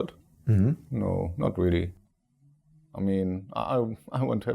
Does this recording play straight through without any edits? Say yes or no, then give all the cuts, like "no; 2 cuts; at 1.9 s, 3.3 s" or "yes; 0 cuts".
yes; 0 cuts